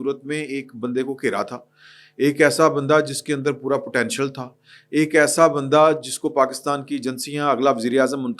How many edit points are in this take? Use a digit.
0